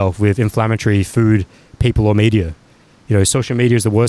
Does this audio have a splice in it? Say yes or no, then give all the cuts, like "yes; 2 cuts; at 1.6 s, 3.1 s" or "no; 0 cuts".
no; 0 cuts